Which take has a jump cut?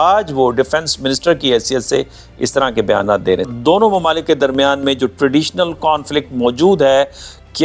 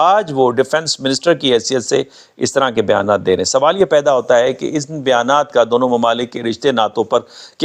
first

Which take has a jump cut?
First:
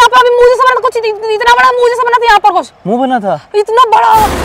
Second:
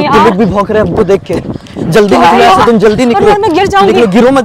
second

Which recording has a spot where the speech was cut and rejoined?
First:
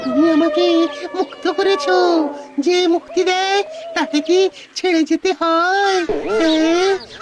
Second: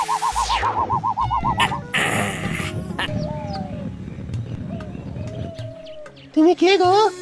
second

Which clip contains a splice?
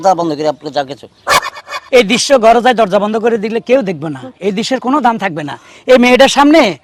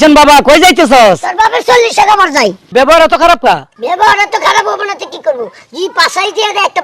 second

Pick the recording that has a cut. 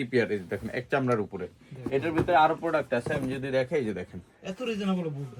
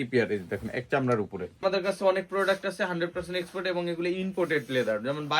second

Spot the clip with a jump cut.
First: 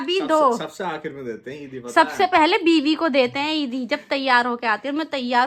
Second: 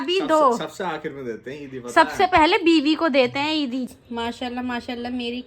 second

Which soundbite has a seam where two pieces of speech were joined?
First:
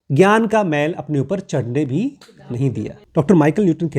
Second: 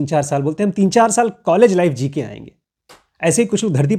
first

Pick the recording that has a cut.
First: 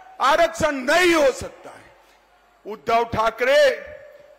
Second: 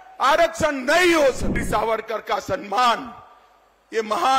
second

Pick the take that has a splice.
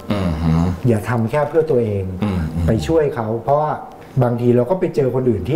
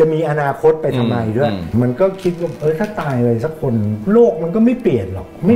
second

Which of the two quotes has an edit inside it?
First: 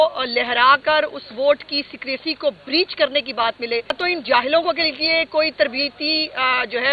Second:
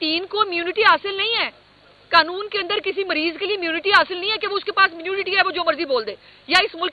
first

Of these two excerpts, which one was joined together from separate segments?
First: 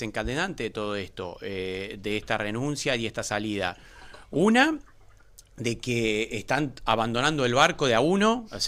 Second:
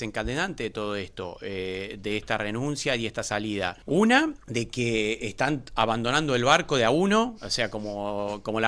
second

